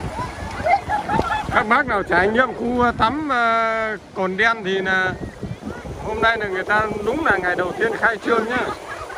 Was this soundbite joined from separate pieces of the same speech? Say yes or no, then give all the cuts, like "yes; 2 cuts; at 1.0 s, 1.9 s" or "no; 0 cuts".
no; 0 cuts